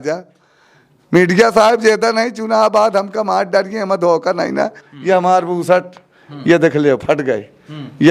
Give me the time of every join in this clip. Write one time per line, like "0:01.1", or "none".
0:04.8

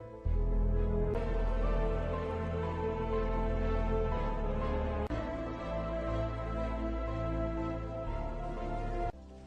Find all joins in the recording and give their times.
0:01.2

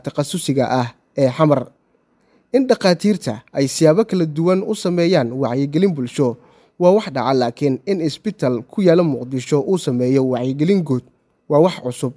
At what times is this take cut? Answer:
0:02.3

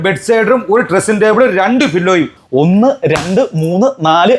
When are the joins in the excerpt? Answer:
0:02.4

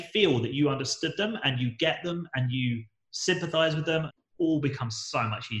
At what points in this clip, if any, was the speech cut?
0:04.1

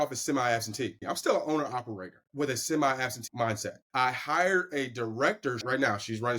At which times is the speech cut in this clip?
0:01.0
0:02.2
0:03.3
0:05.6

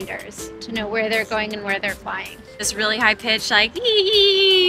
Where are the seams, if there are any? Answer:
0:02.6

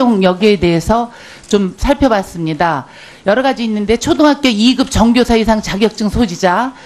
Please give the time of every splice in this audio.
0:04.9

